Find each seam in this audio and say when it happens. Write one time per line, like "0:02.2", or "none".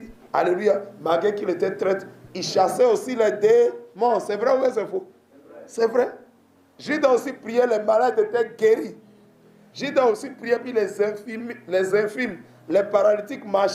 none